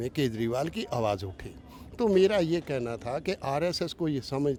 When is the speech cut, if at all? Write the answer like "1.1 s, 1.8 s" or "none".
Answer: none